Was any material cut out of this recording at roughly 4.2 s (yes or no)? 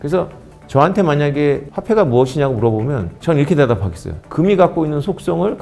yes